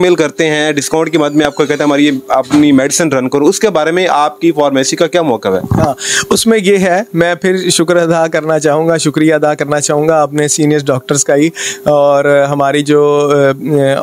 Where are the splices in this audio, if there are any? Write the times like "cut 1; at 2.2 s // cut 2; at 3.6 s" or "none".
none